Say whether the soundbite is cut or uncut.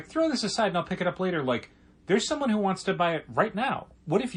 uncut